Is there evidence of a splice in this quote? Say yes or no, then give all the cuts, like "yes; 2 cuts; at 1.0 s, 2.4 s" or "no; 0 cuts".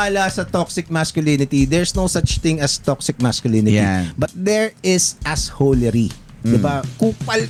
no; 0 cuts